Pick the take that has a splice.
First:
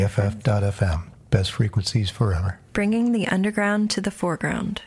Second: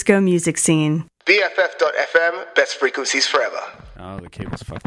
second; 1 cut; at 3.8 s

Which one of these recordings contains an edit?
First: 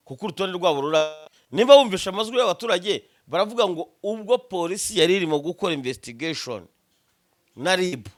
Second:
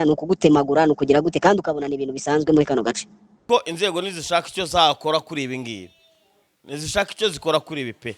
second; 1 cut; at 3.4 s

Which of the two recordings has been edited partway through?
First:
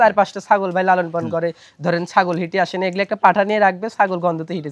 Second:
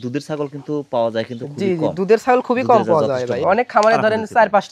second; 1 cut; at 3.4 s

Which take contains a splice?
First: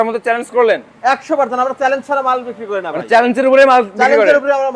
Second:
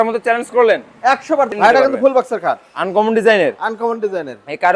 second; 1 cut; at 1.5 s

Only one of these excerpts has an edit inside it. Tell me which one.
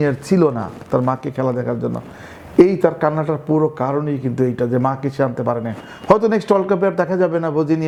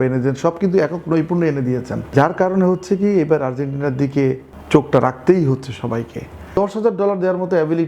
second; 3 cuts; at 2.1 s, 4.5 s, 6.5 s

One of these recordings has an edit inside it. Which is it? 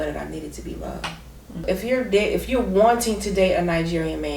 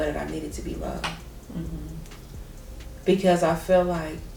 first; 1 cut; at 1.6 s

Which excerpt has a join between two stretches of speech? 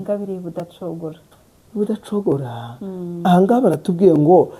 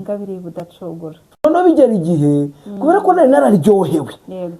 second; 1 cut; at 1.4 s

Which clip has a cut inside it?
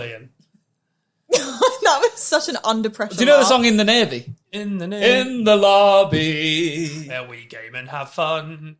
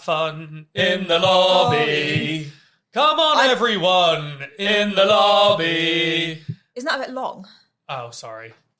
first; 1 cut; at 7.0 s

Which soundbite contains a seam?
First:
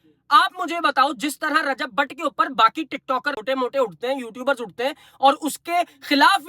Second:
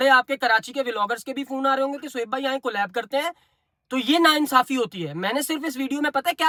first; 1 cut; at 3.4 s

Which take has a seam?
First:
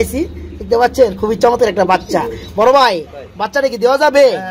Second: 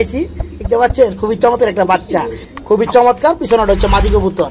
second; 1 cut; at 2.4 s

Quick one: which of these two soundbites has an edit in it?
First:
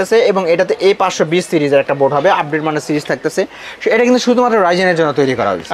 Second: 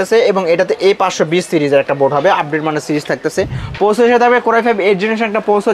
second; 1 cut; at 3.6 s

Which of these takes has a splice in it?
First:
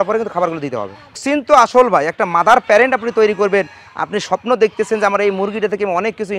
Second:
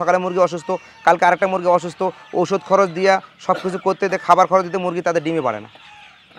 first; 1 cut; at 1.2 s

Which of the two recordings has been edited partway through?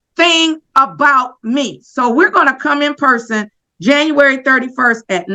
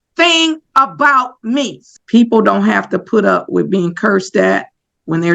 second; 1 cut; at 1.8 s

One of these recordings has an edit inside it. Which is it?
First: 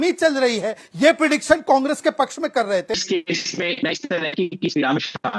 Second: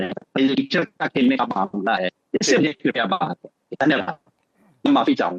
first; 1 cut; at 2.9 s

